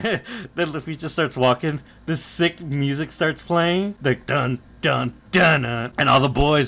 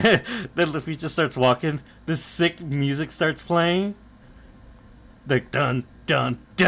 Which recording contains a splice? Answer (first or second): first